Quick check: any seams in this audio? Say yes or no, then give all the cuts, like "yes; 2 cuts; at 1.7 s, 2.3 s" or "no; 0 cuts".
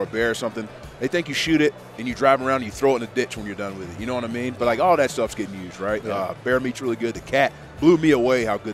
no; 0 cuts